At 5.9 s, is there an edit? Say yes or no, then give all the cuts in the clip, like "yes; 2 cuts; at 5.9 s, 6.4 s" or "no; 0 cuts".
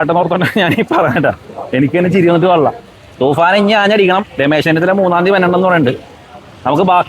no; 0 cuts